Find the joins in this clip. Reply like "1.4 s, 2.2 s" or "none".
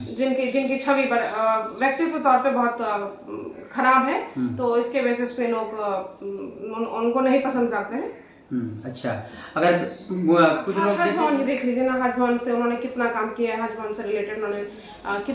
10.9 s